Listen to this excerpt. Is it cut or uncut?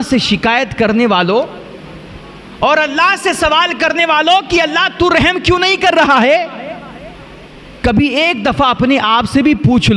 uncut